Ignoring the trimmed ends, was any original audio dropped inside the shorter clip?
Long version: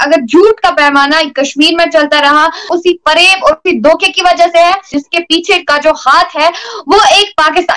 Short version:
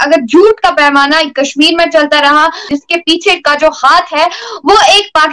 yes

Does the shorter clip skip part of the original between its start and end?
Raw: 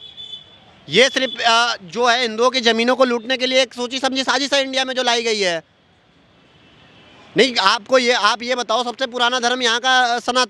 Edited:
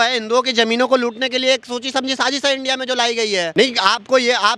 yes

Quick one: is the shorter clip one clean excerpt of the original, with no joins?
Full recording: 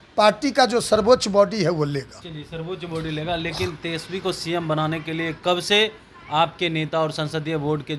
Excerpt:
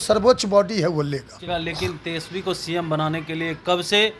no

